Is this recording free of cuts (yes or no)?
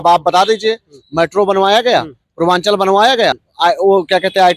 no